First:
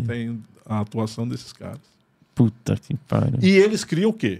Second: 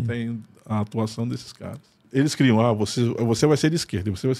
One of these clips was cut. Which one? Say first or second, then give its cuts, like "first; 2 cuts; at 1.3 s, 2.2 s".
second; 1 cut; at 2.0 s